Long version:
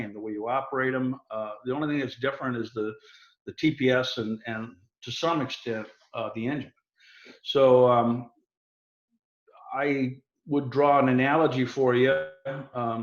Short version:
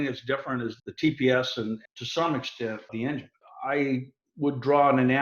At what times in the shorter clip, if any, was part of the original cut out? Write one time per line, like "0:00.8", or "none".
0:00.8
0:01.9
0:02.9